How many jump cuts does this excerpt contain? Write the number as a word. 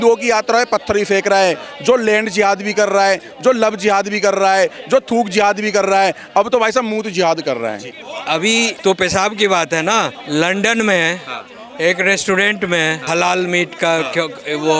three